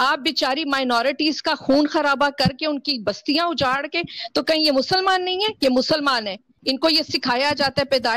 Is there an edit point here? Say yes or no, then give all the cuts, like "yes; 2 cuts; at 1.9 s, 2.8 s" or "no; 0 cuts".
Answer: yes; 1 cut; at 6.5 s